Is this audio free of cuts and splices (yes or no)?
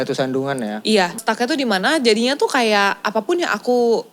no